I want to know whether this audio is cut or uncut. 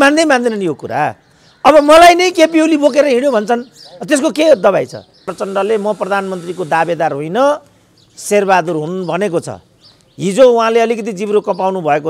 cut